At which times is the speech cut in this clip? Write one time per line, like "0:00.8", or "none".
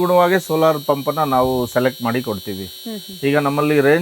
none